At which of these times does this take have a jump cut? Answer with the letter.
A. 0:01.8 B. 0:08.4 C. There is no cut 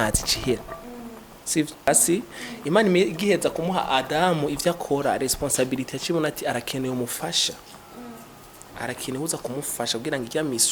A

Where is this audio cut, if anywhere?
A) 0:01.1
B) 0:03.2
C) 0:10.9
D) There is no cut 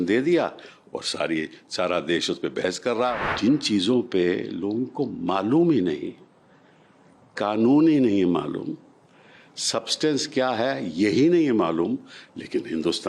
B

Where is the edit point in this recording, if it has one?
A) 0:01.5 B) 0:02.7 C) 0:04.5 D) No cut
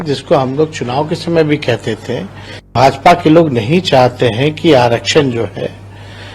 B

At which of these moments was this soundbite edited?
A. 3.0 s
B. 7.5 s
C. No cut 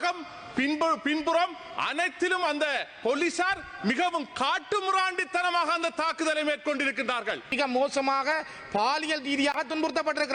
B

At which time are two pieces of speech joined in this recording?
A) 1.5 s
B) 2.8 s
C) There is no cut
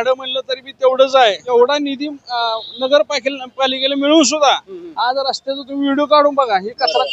A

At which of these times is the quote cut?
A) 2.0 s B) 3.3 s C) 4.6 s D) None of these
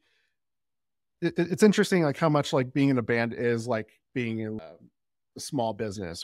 C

